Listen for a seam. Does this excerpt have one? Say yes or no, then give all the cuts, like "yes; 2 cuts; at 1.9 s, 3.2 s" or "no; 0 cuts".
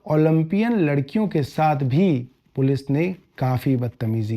yes; 1 cut; at 2.4 s